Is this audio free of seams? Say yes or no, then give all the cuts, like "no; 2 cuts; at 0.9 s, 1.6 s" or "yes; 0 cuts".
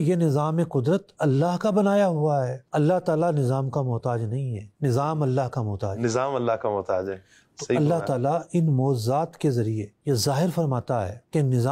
no; 1 cut; at 2.6 s